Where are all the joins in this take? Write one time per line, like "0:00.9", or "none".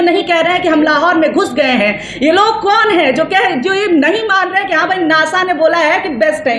none